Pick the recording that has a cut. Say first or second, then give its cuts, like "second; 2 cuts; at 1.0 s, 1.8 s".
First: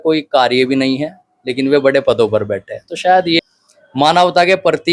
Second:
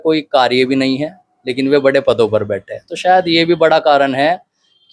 first; 1 cut; at 3.4 s